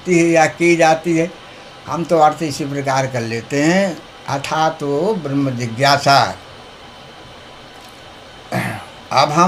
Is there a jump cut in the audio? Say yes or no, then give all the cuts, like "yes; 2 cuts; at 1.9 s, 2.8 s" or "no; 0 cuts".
no; 0 cuts